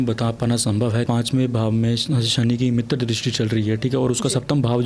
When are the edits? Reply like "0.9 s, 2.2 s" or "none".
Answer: 1.1 s